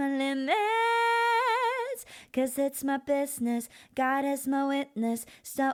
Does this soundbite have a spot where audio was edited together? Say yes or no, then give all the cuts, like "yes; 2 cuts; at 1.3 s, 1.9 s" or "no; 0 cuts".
no; 0 cuts